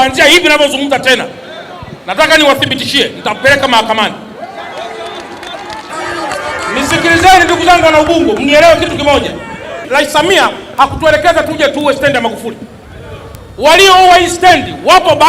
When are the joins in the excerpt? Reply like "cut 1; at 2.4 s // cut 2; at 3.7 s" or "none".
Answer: cut 1; at 5.9 s